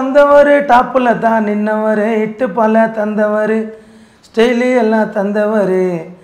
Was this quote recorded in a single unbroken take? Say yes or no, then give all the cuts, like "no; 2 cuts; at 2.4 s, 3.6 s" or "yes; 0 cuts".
yes; 0 cuts